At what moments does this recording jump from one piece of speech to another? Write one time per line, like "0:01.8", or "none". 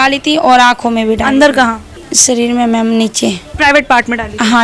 0:03.5